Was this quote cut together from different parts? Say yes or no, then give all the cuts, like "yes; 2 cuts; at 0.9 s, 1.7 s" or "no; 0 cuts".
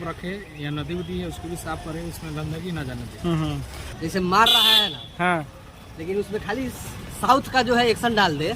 yes; 1 cut; at 3.8 s